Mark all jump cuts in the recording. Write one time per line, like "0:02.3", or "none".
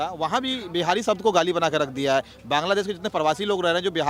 none